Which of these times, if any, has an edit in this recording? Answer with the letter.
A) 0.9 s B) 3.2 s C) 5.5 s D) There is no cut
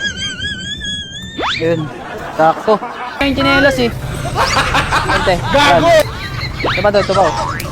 B